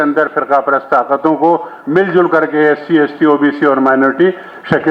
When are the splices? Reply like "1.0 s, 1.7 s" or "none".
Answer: none